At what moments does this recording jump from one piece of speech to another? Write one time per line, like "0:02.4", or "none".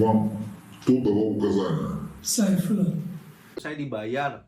0:03.4